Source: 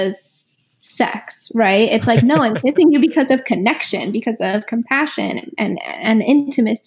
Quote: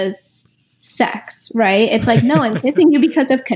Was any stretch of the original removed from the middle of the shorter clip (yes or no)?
no